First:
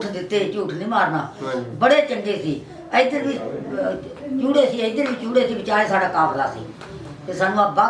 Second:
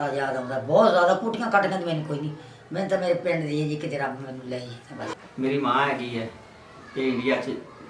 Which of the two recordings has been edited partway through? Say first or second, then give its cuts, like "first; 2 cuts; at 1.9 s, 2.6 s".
second; 1 cut; at 5.1 s